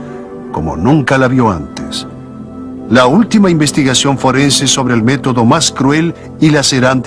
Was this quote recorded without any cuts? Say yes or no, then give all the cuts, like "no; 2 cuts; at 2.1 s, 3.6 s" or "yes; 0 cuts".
yes; 0 cuts